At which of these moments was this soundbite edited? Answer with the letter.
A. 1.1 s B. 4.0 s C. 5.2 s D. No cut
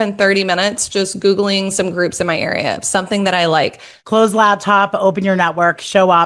B